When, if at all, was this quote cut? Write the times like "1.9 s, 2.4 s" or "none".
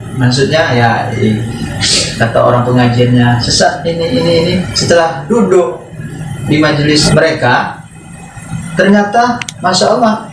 7.0 s

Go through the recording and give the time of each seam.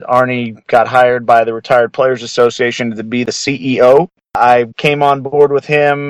3.2 s, 4.5 s

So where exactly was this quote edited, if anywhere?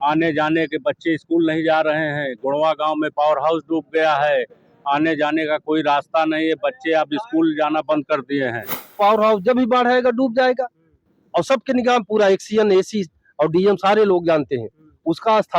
9.0 s

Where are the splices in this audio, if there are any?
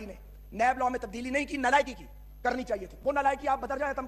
none

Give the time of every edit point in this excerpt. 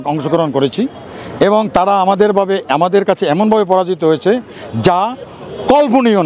none

